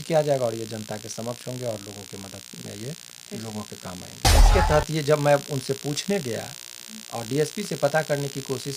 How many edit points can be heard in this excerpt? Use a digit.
1